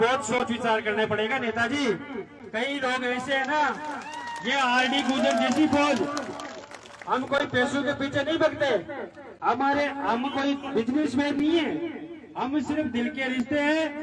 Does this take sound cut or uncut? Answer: uncut